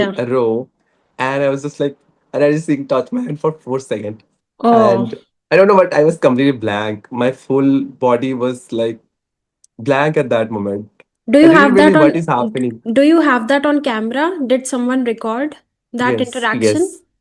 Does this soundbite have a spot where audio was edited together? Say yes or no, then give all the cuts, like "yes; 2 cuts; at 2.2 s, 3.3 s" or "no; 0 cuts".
no; 0 cuts